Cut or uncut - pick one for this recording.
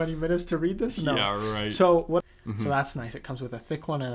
cut